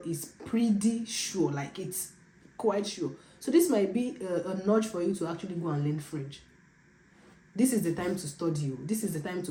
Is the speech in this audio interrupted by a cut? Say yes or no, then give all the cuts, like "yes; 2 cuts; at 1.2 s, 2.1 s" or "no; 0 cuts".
no; 0 cuts